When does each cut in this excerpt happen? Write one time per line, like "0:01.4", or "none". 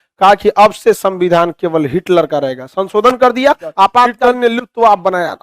0:04.1